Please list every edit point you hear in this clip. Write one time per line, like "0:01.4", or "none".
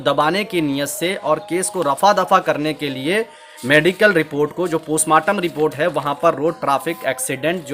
none